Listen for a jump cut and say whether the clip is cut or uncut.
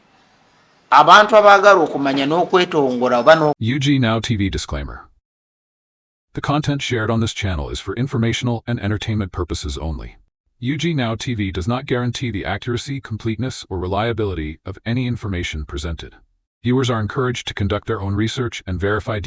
cut